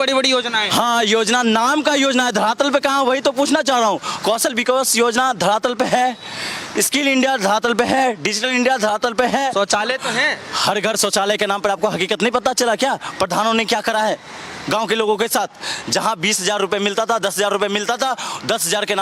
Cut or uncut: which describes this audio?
uncut